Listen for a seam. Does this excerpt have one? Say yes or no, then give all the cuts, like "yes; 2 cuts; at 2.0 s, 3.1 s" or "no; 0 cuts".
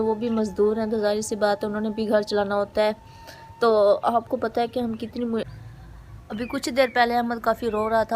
yes; 1 cut; at 5.4 s